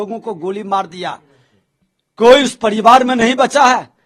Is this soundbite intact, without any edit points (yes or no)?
yes